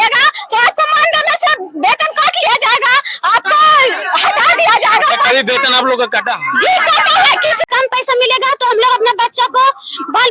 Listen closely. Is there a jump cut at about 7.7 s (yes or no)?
yes